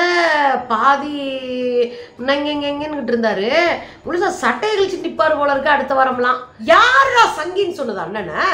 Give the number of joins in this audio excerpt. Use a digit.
1